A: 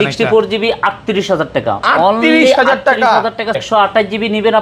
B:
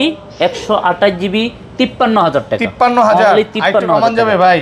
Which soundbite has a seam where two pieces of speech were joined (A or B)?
A